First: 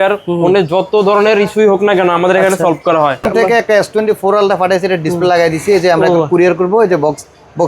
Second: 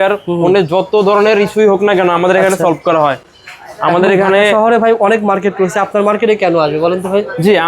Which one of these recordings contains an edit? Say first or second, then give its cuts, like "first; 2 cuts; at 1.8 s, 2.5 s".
first; 1 cut; at 3.3 s